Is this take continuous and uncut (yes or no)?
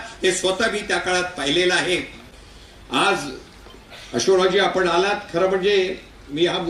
yes